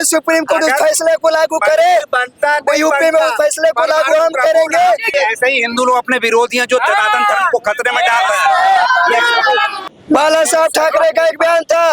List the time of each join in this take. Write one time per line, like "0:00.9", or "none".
0:05.1
0:09.8